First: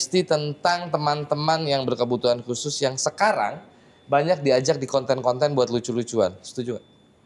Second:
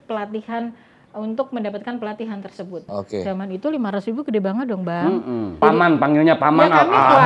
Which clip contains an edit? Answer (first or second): second